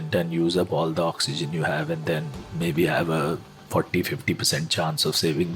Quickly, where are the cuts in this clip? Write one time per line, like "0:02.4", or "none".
none